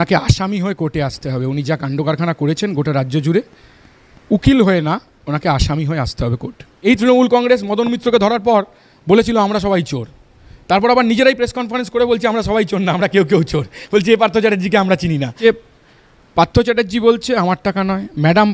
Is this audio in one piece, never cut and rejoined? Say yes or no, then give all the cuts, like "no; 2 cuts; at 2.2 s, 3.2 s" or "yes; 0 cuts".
no; 2 cuts; at 6.9 s, 15.3 s